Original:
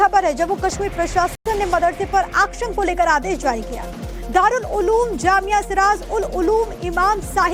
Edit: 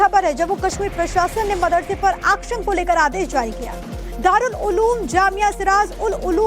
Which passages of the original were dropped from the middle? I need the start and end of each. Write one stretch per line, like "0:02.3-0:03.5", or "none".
0:01.3-0:01.4